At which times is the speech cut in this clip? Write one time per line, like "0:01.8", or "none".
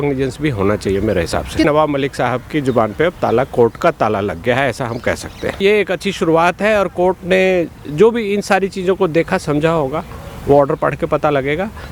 0:01.7
0:05.6